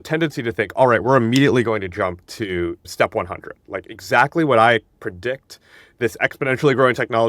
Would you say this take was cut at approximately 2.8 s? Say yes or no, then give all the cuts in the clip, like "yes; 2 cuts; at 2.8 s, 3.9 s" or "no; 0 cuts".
yes; 1 cut; at 2.8 s